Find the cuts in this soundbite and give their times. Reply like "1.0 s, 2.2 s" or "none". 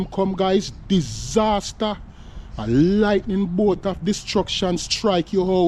none